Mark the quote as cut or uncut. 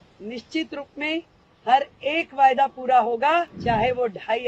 cut